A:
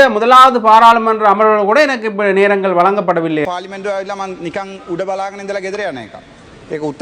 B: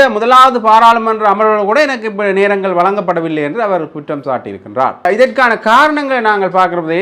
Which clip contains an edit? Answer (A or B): A